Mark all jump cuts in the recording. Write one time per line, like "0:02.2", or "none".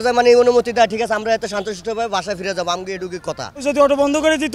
0:03.6